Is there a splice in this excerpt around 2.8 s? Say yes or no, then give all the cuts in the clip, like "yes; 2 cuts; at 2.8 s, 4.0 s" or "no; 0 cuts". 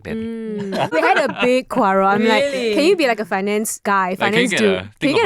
no; 1 cut; at 0.9 s